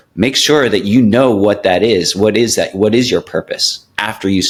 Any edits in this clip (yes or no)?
no